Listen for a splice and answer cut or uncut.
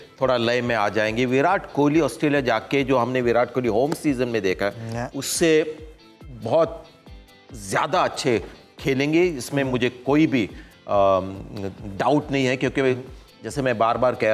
uncut